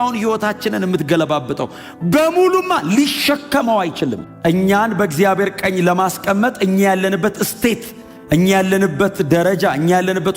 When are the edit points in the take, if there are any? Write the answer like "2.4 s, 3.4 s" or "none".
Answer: 4.3 s